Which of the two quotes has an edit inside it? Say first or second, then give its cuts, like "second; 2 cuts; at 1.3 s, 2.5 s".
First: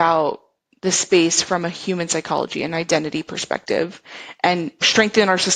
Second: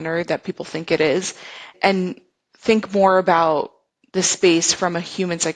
second; 1 cut; at 1.7 s